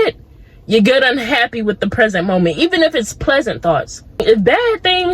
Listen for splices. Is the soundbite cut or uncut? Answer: cut